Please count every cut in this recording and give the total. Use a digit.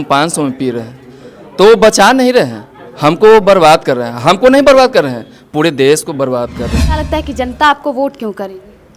1